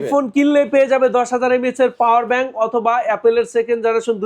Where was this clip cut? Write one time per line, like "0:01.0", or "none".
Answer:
none